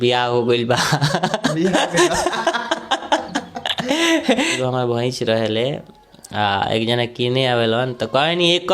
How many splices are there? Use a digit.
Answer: 1